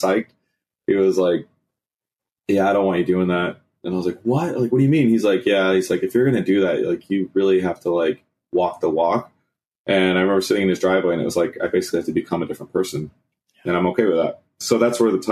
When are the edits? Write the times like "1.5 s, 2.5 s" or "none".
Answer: none